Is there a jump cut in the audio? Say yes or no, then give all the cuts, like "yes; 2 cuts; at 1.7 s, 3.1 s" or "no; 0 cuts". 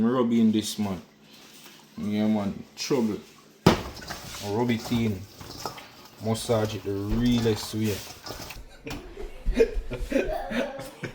yes; 1 cut; at 8.6 s